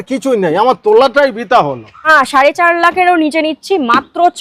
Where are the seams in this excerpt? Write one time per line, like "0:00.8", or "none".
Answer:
0:02.1